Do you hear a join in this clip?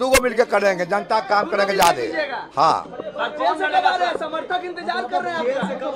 no; 0 cuts

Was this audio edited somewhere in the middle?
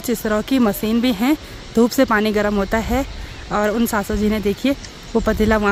no; 0 cuts

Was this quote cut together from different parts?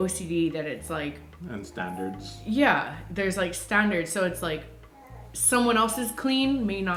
no; 0 cuts

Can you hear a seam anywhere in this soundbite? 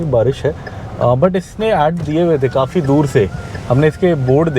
no; 0 cuts

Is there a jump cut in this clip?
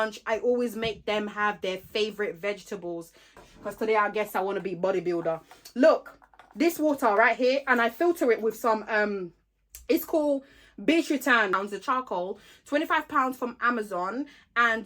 yes; 2 cuts; at 3.4 s, 11.5 s

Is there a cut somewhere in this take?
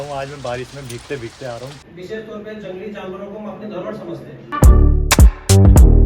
yes; 2 cuts; at 1.8 s, 4.5 s

